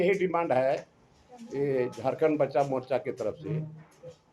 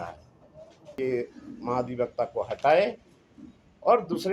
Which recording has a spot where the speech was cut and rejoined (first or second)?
second